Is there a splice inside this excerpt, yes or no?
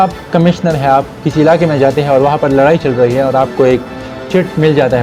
no